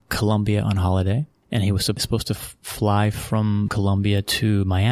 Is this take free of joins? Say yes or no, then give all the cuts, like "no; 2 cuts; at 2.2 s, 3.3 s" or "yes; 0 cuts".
no; 2 cuts; at 2.0 s, 3.7 s